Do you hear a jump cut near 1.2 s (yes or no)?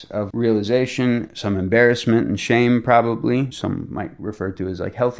no